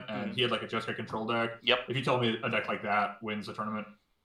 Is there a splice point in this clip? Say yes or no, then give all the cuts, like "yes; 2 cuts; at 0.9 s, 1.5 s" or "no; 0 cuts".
no; 0 cuts